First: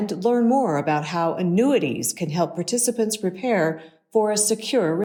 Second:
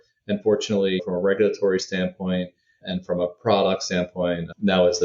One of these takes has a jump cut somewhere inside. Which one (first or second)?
second